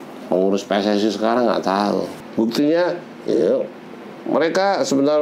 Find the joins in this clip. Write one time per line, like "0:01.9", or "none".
0:02.2